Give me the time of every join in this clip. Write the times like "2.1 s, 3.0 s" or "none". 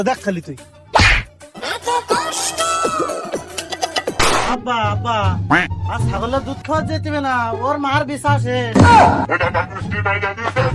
4.3 s